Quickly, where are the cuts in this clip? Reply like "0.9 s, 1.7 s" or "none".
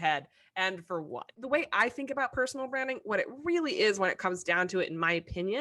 1.4 s